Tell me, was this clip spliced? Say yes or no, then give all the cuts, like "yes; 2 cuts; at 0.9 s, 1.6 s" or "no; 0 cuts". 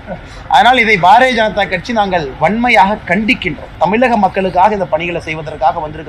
yes; 1 cut; at 3.7 s